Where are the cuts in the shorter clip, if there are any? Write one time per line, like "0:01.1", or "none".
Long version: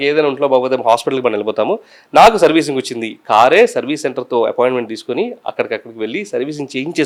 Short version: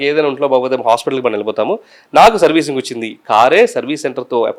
none